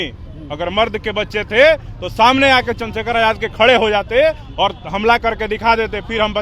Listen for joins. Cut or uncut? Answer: uncut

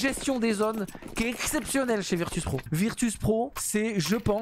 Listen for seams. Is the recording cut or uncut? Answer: cut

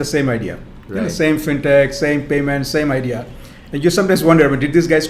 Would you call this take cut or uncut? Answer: uncut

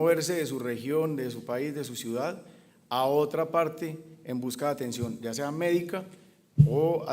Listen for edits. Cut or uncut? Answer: cut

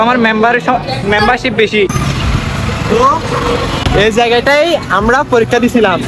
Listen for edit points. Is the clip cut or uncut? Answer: uncut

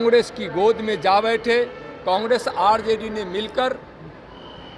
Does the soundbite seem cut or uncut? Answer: cut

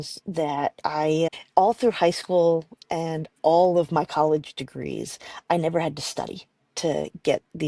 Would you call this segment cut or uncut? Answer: cut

